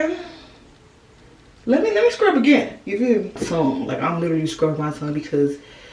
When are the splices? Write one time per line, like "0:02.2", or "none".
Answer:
0:03.4